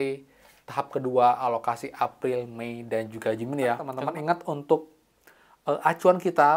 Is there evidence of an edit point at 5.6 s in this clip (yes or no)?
no